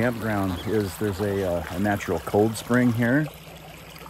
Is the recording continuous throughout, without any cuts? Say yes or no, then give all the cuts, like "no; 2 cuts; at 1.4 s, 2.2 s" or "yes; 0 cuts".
yes; 0 cuts